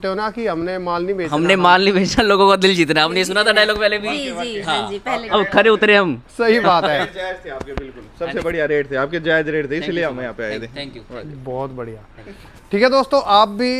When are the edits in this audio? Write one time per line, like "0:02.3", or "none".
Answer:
none